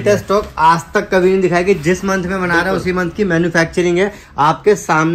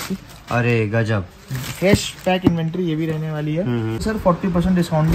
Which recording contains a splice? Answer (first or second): second